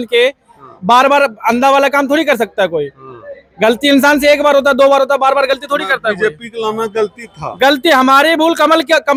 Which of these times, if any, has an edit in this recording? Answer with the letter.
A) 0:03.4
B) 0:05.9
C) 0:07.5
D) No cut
D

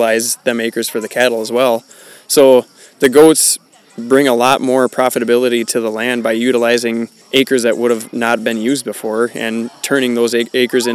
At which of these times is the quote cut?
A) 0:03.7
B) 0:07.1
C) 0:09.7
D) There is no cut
B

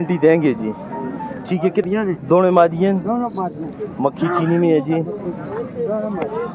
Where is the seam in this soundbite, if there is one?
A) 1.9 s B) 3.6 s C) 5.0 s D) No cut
A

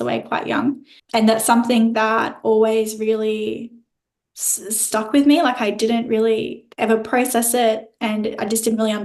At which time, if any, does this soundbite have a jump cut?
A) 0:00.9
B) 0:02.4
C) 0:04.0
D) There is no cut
A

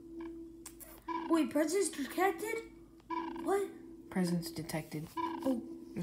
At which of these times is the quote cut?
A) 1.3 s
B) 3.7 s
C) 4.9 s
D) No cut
A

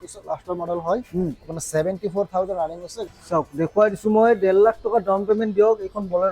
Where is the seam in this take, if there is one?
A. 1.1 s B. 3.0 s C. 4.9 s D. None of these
B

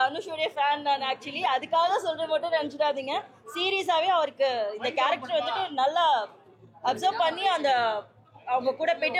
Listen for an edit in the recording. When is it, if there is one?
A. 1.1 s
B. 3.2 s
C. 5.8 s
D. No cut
D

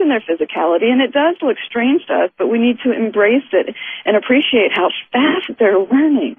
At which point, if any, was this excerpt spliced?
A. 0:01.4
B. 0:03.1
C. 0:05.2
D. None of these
A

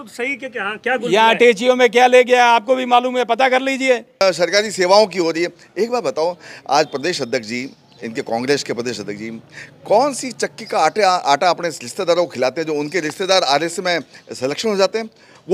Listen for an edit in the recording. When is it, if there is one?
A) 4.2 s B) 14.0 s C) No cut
A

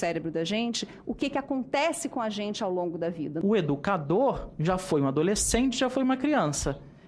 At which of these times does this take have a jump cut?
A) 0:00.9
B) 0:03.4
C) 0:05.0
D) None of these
B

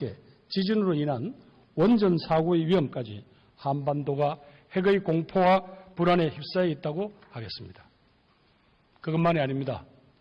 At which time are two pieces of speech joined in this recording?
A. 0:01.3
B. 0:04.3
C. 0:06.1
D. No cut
B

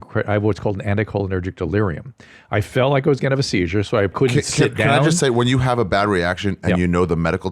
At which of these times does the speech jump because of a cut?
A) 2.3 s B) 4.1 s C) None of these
B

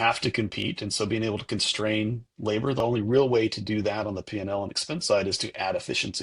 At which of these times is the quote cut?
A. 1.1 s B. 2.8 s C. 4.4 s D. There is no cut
B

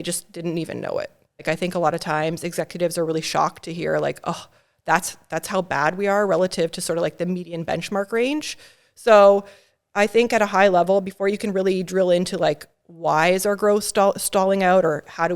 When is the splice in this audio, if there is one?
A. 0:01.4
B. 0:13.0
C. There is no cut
A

